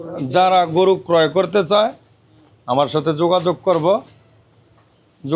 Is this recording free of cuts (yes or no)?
yes